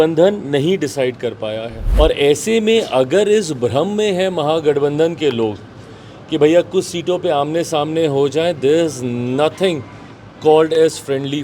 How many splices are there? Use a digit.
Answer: 1